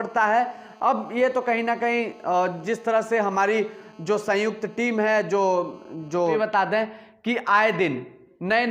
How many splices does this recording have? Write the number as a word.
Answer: one